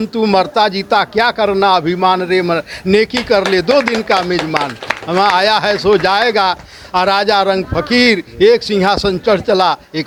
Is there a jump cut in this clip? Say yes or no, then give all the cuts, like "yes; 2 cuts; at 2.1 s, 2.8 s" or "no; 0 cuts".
no; 0 cuts